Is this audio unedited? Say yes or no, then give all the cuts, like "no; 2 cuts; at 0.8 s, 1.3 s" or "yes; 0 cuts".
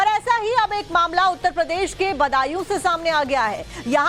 yes; 0 cuts